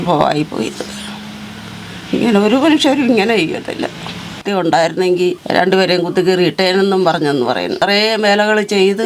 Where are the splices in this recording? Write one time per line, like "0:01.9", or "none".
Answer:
0:04.4
0:07.8